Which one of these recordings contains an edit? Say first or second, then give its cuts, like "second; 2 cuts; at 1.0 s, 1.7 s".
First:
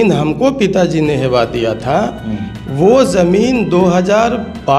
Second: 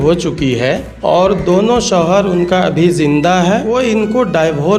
second; 2 cuts; at 0.9 s, 3.7 s